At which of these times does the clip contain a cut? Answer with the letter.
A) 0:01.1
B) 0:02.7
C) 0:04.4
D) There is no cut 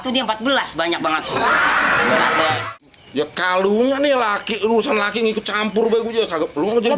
B